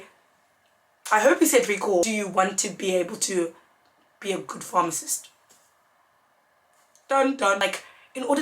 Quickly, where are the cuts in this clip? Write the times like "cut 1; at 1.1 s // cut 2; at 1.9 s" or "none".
cut 1; at 2.0 s // cut 2; at 7.6 s